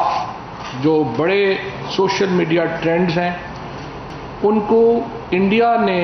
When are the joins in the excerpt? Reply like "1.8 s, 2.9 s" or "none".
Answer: none

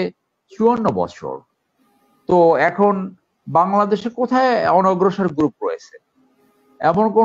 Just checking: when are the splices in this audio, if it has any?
none

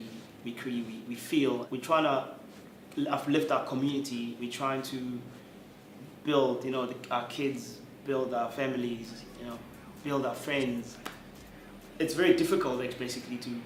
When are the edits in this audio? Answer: none

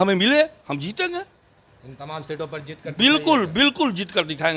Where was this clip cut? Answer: none

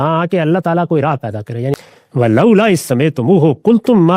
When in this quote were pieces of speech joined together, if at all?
1.7 s

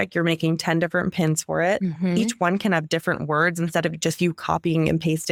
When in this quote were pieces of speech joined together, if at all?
none

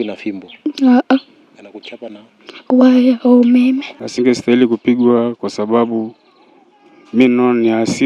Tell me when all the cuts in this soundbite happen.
4.0 s

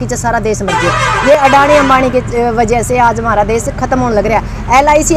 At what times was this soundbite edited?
none

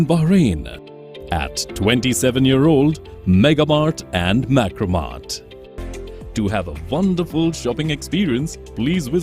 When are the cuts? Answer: 5.8 s

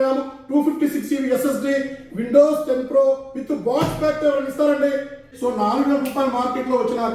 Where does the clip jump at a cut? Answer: 5.2 s

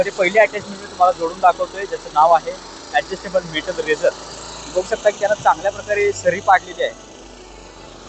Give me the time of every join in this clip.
none

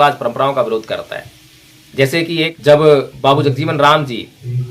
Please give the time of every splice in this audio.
2.5 s

